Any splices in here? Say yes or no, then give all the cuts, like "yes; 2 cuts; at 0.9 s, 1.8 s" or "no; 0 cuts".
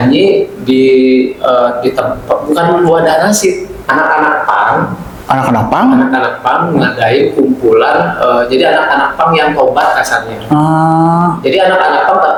no; 0 cuts